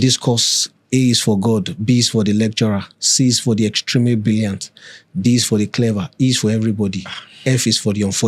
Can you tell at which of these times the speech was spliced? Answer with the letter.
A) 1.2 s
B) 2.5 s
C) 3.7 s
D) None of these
D